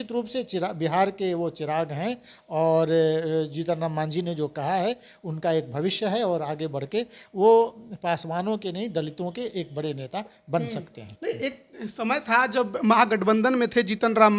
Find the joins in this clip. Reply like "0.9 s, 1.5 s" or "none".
none